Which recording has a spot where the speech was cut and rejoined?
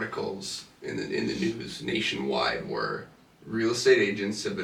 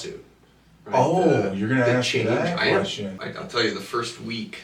second; 1 cut; at 3.2 s

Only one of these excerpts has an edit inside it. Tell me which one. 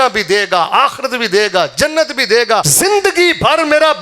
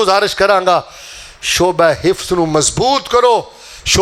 first; 1 cut; at 2.7 s

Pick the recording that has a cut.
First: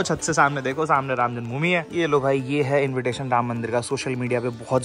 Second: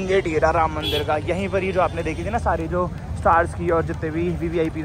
first; 1 cut; at 1.9 s

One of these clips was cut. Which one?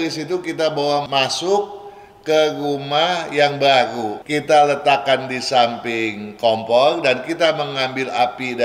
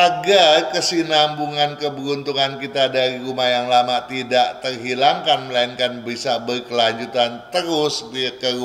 first; 2 cuts; at 1.1 s, 4.1 s

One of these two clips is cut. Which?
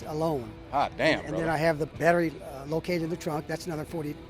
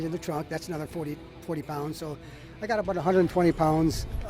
first; 1 cut; at 1.9 s

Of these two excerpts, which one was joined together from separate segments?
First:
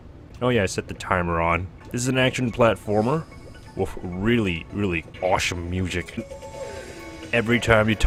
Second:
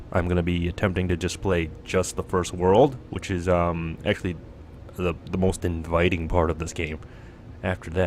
second; 1 cut; at 3.6 s

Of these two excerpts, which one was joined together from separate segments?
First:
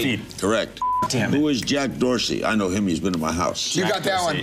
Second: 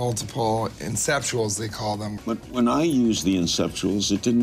second; 1 cut; at 2.1 s

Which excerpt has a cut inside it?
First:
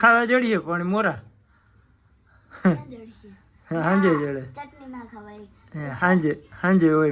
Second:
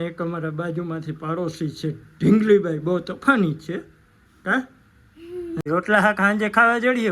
second; 1 cut; at 5.6 s

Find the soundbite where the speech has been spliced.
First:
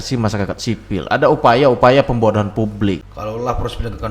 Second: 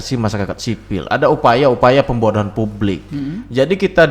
first; 1 cut; at 3.1 s

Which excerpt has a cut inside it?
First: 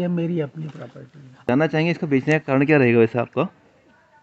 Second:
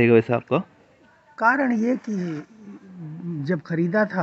first; 1 cut; at 1.4 s

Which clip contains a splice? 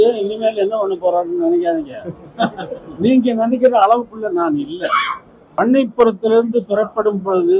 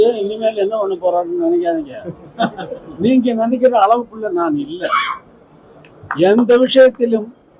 first; 1 cut; at 5.3 s

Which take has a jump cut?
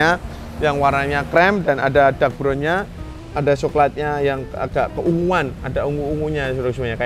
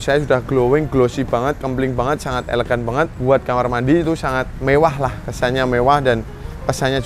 second; 2 cuts; at 3.2 s, 4.5 s

